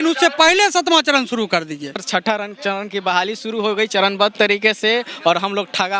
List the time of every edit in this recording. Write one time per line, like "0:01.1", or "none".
0:02.0

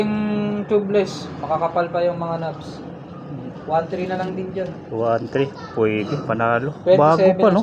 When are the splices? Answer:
none

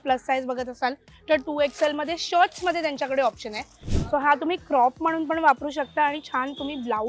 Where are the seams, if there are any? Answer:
0:03.8

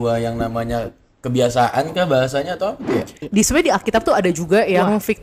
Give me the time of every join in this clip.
0:03.1

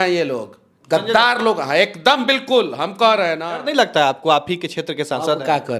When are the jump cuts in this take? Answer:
0:03.5

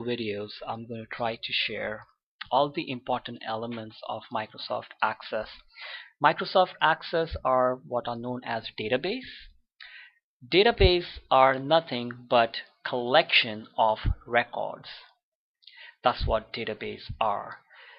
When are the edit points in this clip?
none

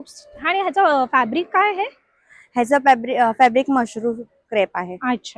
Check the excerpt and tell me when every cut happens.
none

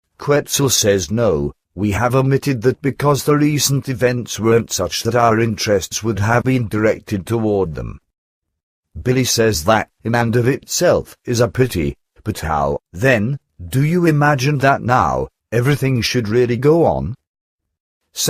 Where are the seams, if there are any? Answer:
0:00.7
0:03.1

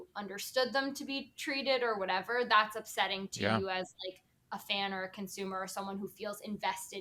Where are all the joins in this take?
none

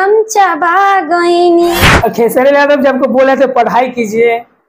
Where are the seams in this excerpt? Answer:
0:01.9

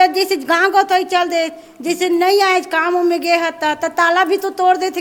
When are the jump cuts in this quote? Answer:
none

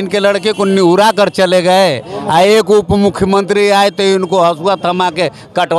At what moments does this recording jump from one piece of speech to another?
none

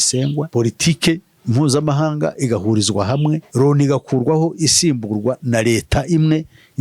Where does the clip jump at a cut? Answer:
0:03.5

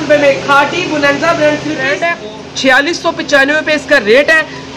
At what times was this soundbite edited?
0:01.9

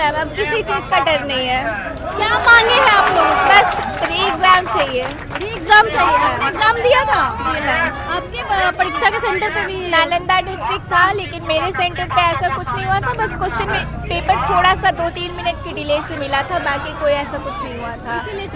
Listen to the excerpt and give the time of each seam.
none

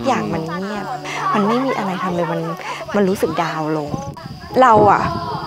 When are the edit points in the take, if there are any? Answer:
0:01.0
0:04.0

